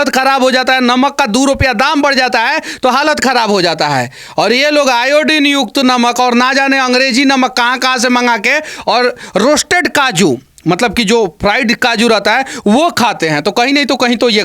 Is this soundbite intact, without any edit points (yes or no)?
yes